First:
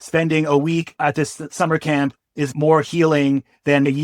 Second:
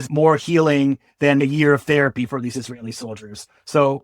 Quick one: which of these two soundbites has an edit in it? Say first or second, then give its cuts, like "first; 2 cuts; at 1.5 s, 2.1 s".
first; 1 cut; at 0.9 s